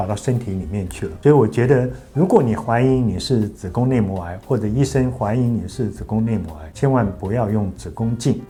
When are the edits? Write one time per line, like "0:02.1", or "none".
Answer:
none